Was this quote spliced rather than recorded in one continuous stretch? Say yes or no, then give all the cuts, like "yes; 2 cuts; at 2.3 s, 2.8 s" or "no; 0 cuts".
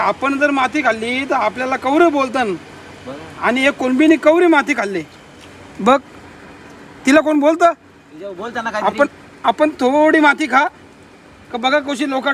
no; 0 cuts